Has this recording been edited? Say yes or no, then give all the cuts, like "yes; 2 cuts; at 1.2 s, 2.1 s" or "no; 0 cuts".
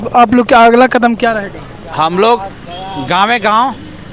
no; 0 cuts